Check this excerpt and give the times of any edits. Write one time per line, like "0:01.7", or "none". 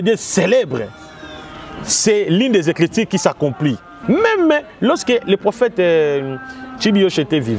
0:03.9